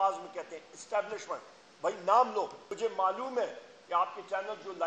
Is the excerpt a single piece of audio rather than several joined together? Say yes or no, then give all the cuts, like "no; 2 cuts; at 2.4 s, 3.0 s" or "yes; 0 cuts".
no; 1 cut; at 2.6 s